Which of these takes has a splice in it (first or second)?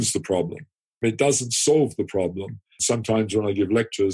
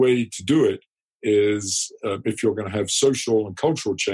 first